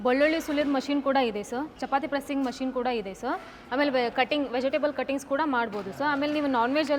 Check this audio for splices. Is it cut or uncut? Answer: uncut